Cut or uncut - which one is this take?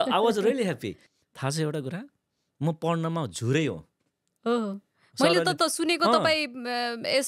cut